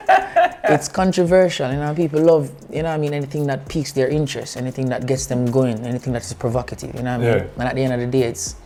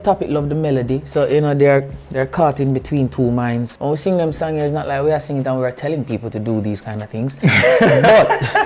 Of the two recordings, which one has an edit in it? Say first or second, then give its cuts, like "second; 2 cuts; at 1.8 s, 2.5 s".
second; 1 cut; at 3.7 s